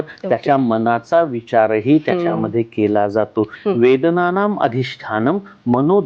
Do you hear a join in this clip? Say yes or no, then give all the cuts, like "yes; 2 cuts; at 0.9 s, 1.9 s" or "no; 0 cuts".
yes; 1 cut; at 3.6 s